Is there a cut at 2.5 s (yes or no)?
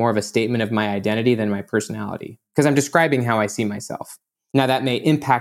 no